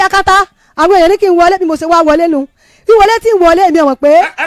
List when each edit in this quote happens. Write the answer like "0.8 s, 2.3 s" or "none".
none